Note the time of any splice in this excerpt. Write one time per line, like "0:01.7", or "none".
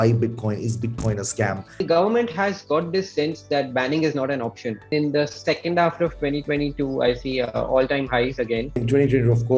0:01.8
0:04.9
0:08.8